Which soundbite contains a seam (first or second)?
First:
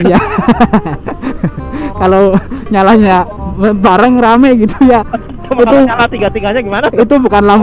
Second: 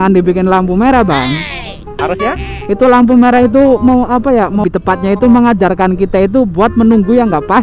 second